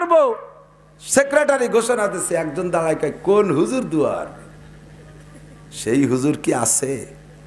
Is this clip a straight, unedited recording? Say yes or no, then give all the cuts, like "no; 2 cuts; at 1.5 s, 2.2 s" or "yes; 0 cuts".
yes; 0 cuts